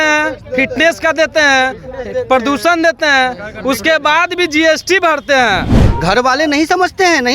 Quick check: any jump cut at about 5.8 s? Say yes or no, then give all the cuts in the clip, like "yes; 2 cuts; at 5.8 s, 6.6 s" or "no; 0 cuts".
yes; 1 cut; at 5.8 s